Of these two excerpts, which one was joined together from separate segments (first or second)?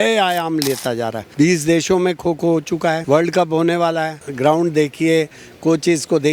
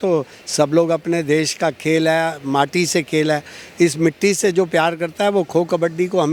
first